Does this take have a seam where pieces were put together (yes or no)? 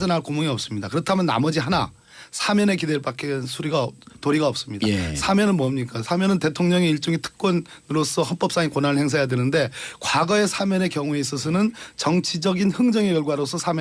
yes